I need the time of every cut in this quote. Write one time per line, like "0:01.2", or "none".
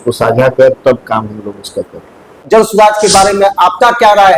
0:02.4

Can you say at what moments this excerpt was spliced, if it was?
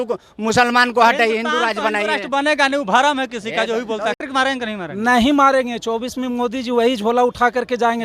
0:04.2

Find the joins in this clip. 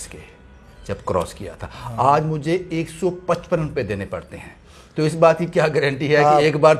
none

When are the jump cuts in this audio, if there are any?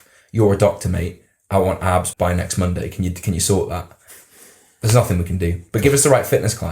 0:02.1

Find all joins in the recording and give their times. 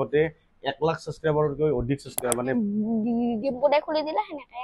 0:02.6

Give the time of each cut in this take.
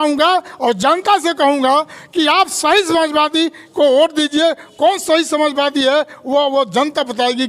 none

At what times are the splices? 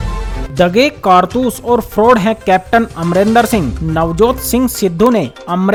none

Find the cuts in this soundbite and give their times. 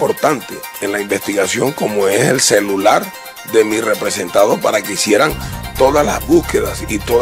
none

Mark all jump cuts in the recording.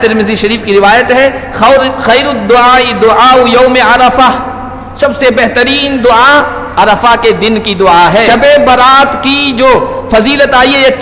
0:08.3

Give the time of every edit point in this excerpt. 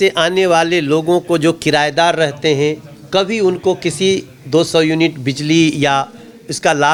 none

